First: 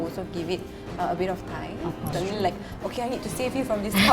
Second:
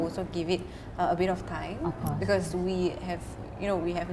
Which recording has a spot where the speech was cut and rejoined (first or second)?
first